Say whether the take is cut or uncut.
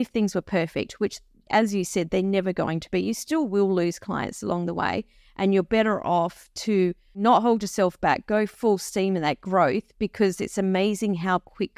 cut